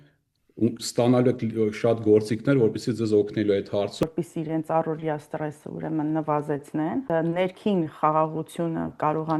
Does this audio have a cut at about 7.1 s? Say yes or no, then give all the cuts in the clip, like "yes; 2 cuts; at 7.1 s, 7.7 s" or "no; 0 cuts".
yes; 2 cuts; at 4.0 s, 7.1 s